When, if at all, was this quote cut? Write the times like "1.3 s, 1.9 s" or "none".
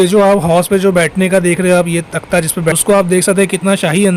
2.8 s